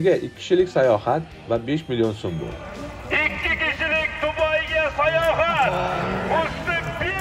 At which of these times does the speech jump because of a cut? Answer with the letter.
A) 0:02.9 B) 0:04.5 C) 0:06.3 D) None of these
D